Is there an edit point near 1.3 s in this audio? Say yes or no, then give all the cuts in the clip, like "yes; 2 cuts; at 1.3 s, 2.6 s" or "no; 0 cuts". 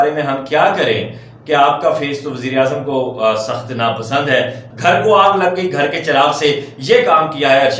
no; 1 cut; at 4.6 s